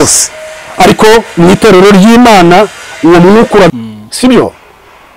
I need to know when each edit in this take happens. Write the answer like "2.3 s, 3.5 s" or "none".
3.7 s